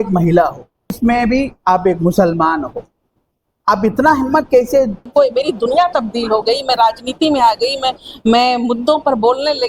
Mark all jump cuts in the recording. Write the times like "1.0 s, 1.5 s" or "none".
1.0 s, 5.0 s